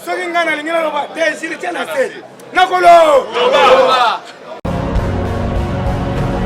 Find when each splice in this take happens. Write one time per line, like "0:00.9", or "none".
0:04.6